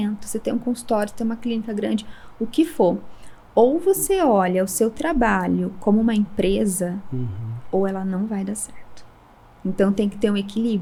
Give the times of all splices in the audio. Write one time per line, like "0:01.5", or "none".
none